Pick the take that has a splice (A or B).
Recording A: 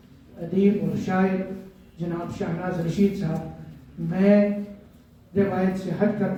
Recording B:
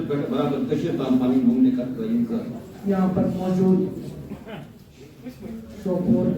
B